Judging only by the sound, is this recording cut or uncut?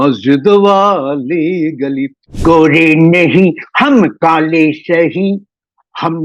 cut